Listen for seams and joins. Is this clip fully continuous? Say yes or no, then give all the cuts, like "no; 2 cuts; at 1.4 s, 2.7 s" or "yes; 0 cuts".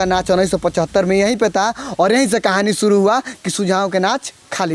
yes; 0 cuts